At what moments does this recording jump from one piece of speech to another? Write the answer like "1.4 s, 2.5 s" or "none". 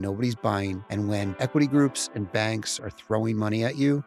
1.3 s